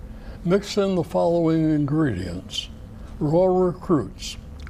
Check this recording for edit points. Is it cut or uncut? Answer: uncut